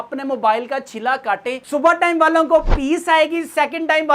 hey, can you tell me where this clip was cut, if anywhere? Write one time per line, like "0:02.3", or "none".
0:01.6